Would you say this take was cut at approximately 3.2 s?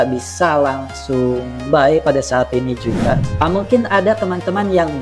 yes; 1 cut; at 3.2 s

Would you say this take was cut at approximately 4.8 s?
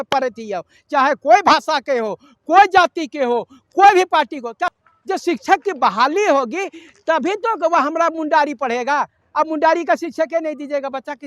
yes; 1 cut; at 4.8 s

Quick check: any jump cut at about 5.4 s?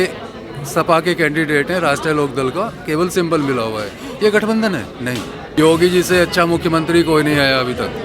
yes; 1 cut; at 5.4 s

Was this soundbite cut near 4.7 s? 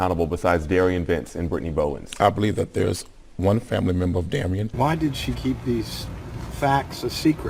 yes; 1 cut; at 4.7 s

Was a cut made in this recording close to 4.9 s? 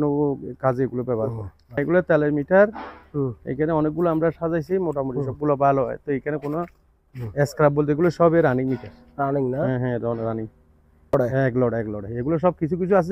no; 2 cuts; at 1.8 s, 11.1 s

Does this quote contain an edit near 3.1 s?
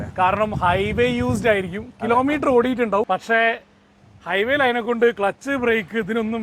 yes; 1 cut; at 3.1 s

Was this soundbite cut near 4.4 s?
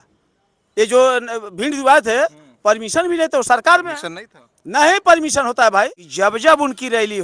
no; 1 cut; at 6.0 s

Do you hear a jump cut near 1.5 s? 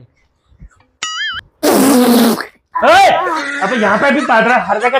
no; 1 cut; at 3.4 s

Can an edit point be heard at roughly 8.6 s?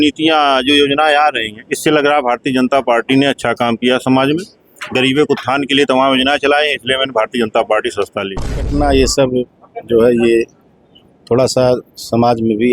yes; 1 cut; at 8.6 s

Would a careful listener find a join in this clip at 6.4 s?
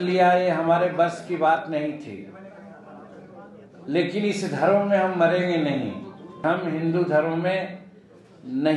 yes; 1 cut; at 6.4 s

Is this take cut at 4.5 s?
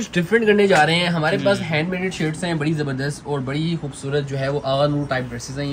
no; 0 cuts

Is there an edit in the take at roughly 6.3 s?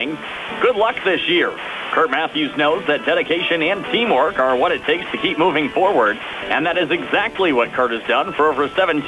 no; 0 cuts

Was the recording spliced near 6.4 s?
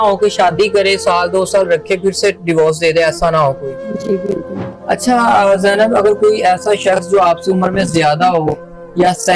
no; 1 cut; at 4.7 s

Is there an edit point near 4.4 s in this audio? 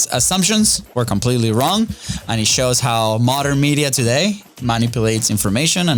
no; 0 cuts

